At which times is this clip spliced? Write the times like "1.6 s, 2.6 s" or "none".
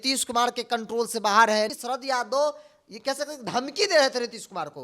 1.8 s